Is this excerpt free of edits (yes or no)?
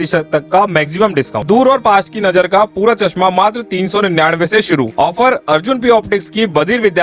no